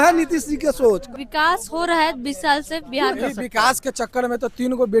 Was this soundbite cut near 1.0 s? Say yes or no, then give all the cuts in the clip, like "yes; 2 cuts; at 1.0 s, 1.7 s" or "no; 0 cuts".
yes; 2 cuts; at 1.0 s, 3.2 s